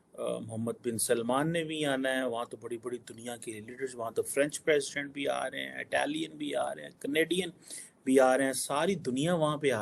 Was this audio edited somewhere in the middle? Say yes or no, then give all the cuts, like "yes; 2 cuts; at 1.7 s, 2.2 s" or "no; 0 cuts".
no; 0 cuts